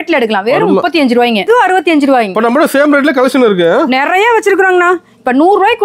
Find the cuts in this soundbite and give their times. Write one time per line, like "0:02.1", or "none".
0:01.5